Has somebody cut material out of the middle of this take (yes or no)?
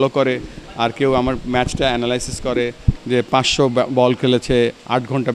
no